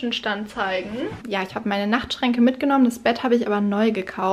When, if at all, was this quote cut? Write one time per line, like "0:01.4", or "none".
0:01.2